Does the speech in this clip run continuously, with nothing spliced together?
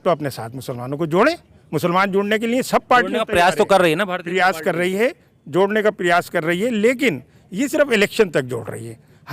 yes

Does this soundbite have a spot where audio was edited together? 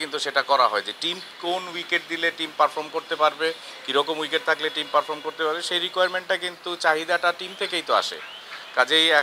no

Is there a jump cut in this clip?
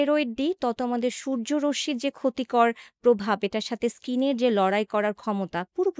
no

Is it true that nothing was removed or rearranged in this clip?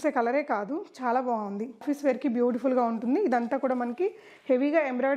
no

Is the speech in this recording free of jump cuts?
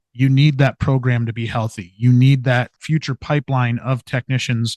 no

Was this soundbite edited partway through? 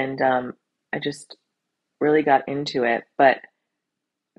no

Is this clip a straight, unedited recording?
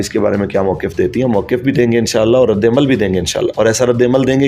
yes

